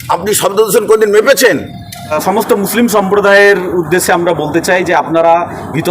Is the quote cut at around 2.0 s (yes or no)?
yes